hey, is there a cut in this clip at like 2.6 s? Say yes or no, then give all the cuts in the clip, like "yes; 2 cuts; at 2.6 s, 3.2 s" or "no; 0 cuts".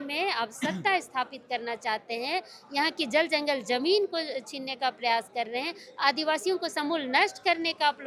no; 0 cuts